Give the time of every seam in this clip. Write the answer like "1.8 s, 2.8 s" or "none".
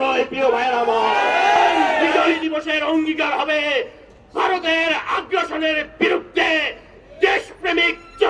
2.4 s